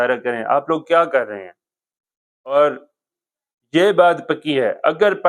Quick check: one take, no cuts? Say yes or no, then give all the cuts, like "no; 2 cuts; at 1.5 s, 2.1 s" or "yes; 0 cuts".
no; 1 cut; at 2.5 s